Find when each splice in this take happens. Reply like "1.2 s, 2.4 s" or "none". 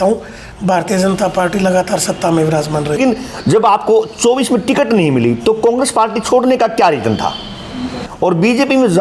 3.0 s, 8.0 s